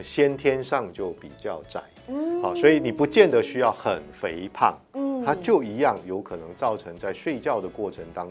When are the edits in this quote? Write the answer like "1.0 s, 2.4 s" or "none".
none